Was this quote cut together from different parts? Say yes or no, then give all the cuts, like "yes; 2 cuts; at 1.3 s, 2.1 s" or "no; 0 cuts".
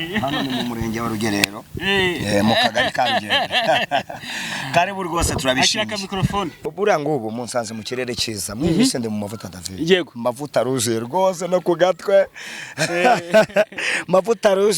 yes; 1 cut; at 6.5 s